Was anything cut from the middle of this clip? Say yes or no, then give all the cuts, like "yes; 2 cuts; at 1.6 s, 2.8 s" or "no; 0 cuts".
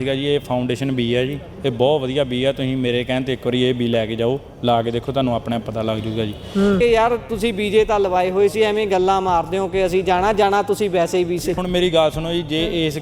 yes; 2 cuts; at 6.8 s, 11.6 s